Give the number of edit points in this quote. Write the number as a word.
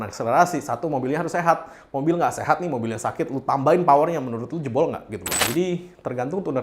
one